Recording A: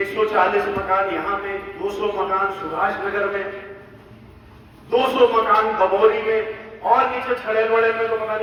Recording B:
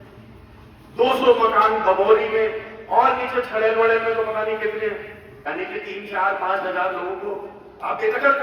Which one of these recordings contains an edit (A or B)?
B